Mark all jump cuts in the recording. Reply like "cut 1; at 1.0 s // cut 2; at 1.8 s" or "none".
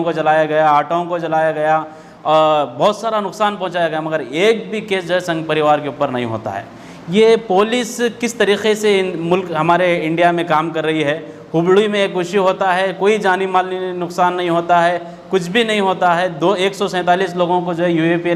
none